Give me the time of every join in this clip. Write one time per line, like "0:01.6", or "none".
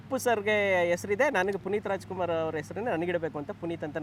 none